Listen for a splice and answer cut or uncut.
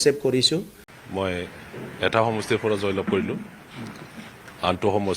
cut